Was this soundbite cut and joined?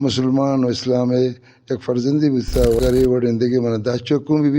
yes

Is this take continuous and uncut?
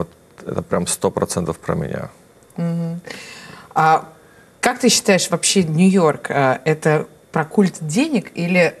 yes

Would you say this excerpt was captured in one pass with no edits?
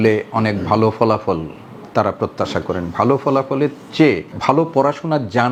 yes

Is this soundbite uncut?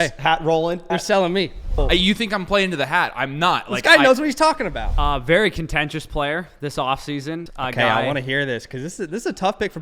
no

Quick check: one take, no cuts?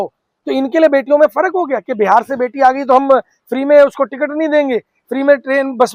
yes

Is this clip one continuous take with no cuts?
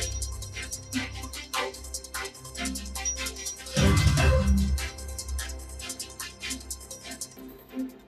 yes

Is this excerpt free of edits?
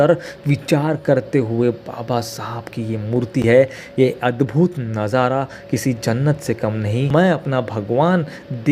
yes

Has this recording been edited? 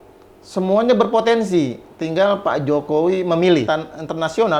yes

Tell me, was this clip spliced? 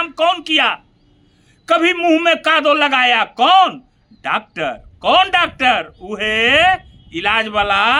no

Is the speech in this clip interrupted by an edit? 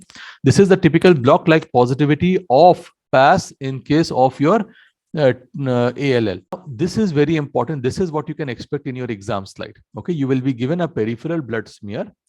yes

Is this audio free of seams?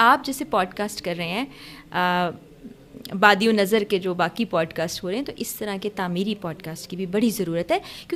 yes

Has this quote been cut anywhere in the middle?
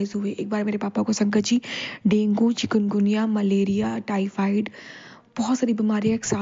no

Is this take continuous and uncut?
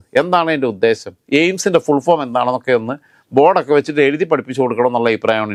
yes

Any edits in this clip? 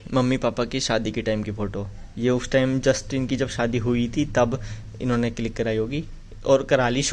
no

